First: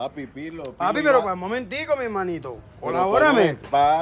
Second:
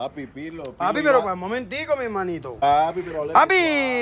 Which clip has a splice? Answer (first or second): second